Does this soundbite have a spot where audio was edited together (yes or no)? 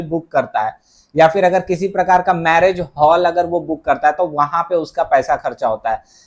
no